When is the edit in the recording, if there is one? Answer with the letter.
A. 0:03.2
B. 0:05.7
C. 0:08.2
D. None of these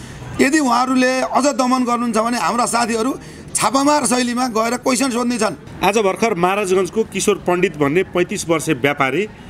B